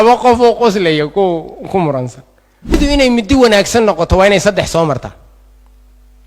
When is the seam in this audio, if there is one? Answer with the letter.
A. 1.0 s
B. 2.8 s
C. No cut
B